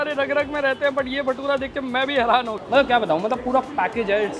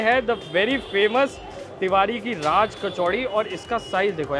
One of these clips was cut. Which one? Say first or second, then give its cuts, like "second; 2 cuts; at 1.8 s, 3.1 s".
first; 1 cut; at 2.6 s